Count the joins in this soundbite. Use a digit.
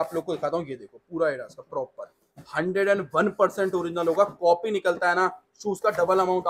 0